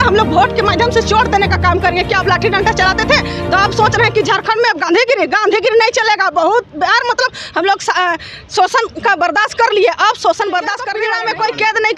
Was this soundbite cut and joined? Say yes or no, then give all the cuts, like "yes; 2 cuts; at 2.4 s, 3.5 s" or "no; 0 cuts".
yes; 1 cut; at 10.9 s